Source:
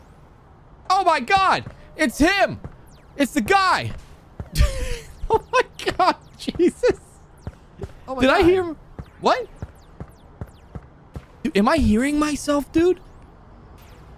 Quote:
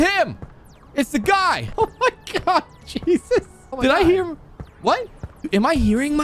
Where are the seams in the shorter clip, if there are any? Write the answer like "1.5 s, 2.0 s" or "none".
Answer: 1.7 s, 3.6 s, 5.5 s